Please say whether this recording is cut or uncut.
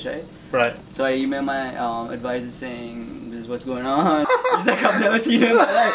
cut